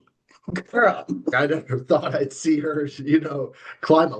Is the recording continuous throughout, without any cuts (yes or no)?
no